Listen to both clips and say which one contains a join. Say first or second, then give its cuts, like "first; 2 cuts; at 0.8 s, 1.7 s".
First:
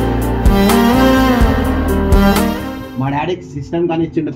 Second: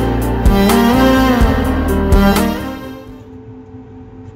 first; 1 cut; at 2.8 s